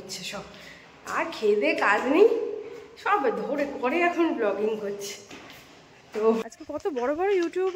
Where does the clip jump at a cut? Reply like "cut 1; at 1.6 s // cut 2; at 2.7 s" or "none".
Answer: cut 1; at 6.5 s